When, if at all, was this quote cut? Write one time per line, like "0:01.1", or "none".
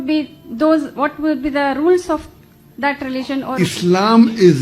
0:03.5